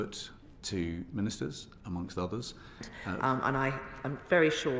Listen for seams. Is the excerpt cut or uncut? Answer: cut